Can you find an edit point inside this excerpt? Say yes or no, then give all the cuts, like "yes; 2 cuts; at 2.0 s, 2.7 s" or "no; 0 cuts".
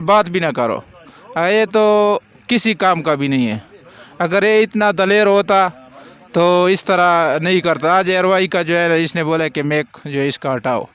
no; 0 cuts